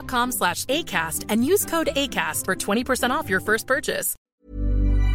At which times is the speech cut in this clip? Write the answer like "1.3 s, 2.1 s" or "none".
4.1 s